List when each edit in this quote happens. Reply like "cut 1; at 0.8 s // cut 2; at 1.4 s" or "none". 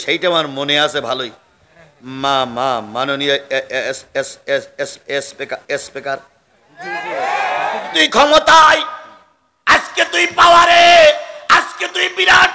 cut 1; at 7.9 s